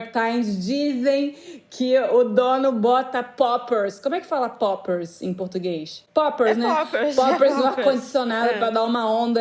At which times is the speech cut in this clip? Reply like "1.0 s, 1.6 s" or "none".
none